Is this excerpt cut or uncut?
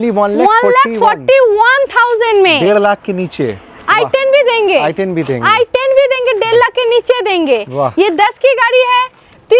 uncut